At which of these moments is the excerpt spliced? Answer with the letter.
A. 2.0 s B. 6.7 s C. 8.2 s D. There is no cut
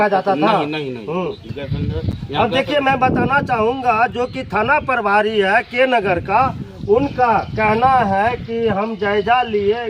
D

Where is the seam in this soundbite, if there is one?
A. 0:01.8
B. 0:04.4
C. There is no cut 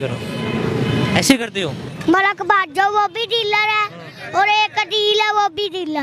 A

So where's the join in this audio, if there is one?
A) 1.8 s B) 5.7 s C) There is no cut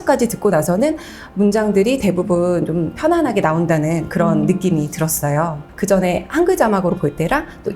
B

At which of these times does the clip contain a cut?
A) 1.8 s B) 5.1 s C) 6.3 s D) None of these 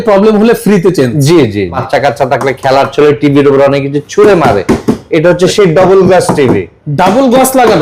A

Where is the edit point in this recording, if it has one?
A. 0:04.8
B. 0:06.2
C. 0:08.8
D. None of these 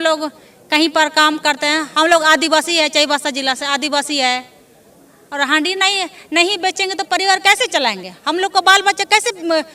D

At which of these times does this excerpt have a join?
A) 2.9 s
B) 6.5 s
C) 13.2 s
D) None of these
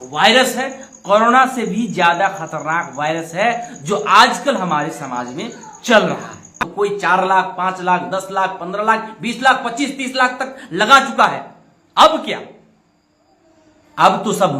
B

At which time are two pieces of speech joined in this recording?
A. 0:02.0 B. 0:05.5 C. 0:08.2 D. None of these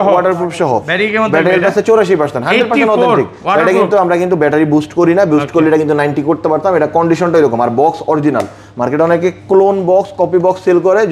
D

